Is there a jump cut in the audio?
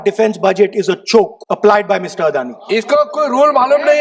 yes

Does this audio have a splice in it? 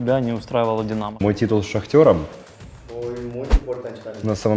yes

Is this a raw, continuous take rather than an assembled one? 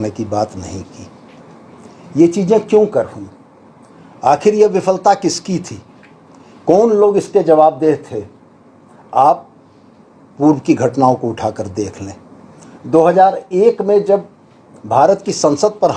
yes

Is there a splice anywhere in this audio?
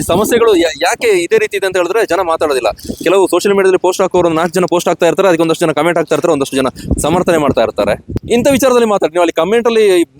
yes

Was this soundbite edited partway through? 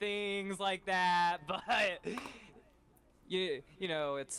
no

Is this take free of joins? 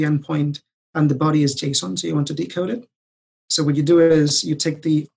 yes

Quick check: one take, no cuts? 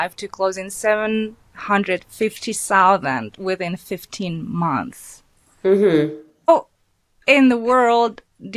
no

